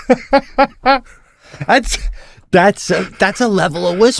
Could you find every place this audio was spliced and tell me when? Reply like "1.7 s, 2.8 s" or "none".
none